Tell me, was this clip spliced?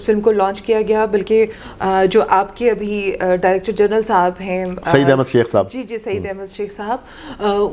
no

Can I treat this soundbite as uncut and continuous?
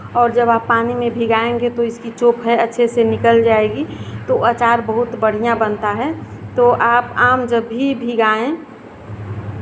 yes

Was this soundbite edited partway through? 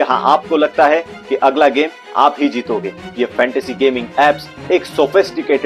yes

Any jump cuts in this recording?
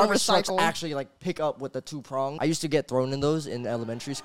yes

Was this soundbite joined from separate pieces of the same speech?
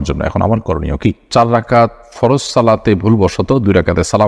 yes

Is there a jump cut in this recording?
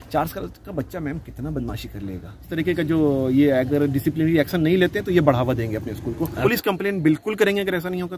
yes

